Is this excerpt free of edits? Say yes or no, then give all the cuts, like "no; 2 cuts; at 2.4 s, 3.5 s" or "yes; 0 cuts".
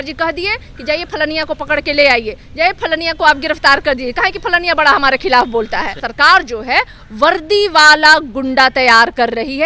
no; 1 cut; at 6.0 s